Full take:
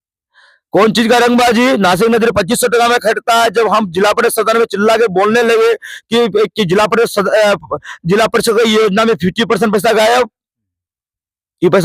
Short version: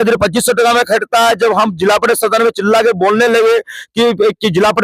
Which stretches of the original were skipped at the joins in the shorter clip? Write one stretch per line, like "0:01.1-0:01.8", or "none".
none